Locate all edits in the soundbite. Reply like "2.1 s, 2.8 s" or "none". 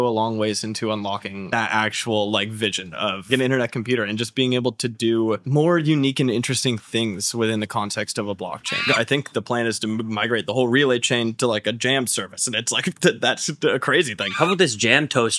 1.5 s, 3.2 s, 8.9 s, 14.3 s